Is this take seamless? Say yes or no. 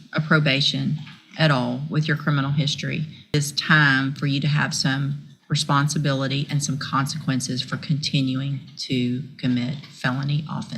no